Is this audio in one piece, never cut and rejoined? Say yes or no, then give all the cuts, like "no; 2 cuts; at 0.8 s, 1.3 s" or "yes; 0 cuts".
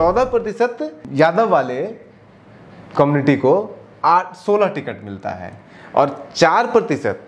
no; 1 cut; at 1.0 s